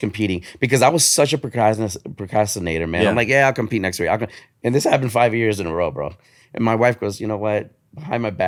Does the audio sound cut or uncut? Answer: uncut